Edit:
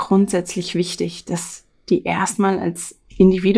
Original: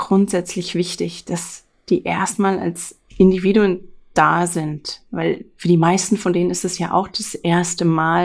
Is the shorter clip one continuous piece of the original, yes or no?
yes